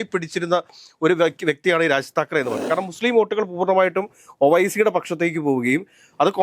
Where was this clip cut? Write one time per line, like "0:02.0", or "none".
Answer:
0:02.6